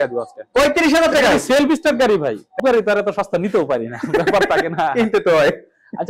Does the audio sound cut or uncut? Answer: cut